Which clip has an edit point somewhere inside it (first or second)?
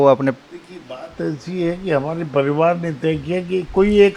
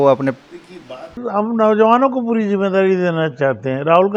second